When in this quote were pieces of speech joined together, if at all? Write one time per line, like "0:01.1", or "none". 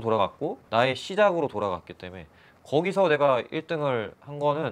none